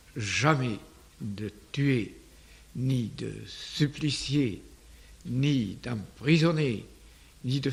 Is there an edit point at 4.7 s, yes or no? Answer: no